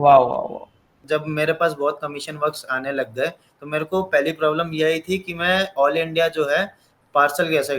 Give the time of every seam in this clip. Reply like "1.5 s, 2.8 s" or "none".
1.1 s